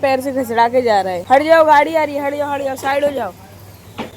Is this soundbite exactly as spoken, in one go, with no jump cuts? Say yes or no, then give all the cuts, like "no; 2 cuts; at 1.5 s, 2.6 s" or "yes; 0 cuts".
no; 1 cut; at 1.2 s